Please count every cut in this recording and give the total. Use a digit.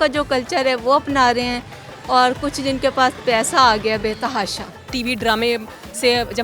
1